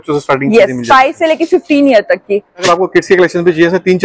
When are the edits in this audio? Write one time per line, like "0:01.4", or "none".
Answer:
0:02.8